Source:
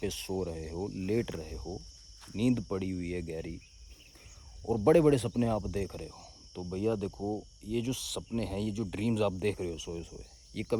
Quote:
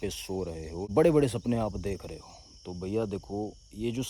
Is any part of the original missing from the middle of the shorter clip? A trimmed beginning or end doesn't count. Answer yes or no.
yes